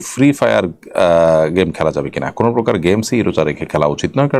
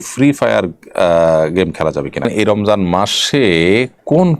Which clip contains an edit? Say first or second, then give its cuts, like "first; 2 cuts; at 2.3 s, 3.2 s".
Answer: second; 1 cut; at 2.3 s